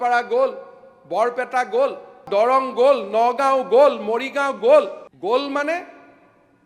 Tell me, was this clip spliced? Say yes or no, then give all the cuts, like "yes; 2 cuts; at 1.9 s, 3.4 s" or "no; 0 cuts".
yes; 2 cuts; at 2.2 s, 5.1 s